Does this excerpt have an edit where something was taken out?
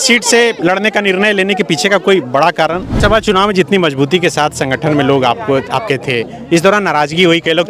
yes; 1 cut; at 3.0 s

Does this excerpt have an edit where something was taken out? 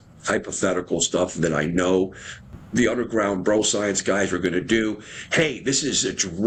no; 0 cuts

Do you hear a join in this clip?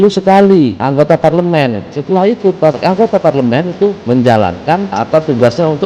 yes; 3 cuts; at 0.8 s, 4.0 s, 4.9 s

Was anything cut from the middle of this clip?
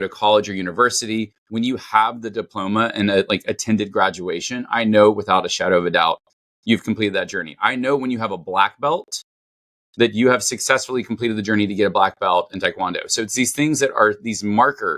yes; 1 cut; at 1.4 s

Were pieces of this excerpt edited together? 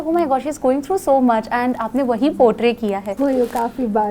yes; 1 cut; at 3.1 s

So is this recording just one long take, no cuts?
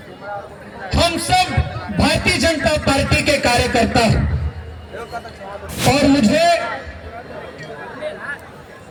yes; 0 cuts

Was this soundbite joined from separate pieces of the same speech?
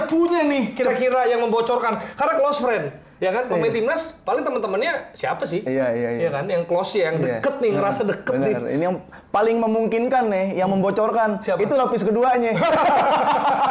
no; 0 cuts

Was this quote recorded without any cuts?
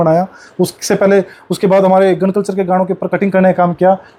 yes; 0 cuts

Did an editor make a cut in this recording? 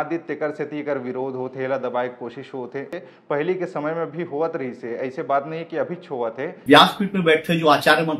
yes; 2 cuts; at 3.0 s, 6.5 s

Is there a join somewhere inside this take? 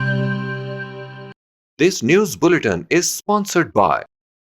yes; 1 cut; at 1.3 s

